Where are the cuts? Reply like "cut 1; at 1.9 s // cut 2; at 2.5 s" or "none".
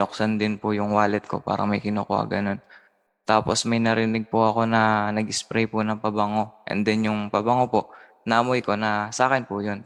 none